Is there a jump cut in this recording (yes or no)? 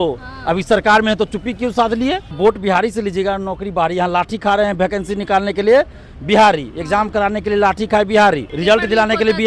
yes